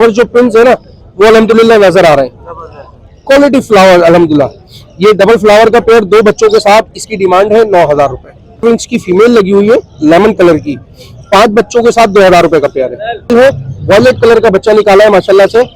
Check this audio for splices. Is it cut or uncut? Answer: cut